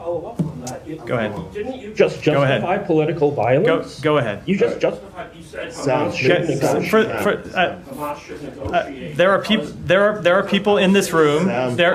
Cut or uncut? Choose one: uncut